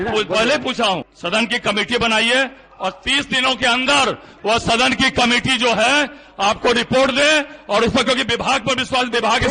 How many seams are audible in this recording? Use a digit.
1